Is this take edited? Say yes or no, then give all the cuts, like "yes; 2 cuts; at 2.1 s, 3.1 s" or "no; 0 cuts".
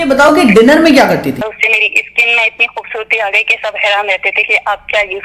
yes; 1 cut; at 1.4 s